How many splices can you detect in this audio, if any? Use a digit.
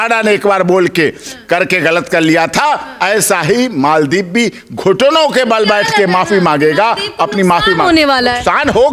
0